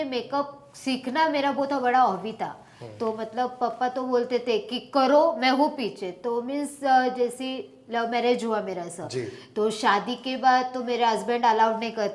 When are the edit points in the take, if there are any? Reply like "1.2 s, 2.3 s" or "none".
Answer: none